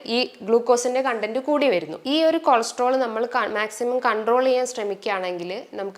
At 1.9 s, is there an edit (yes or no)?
yes